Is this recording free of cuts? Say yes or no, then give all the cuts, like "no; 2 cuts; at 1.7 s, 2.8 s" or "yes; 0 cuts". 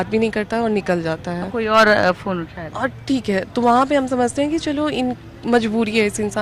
yes; 0 cuts